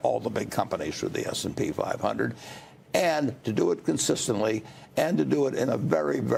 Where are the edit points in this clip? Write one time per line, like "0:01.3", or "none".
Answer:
none